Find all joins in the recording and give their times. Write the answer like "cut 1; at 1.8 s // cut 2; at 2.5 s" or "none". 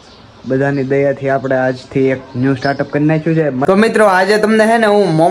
cut 1; at 3.8 s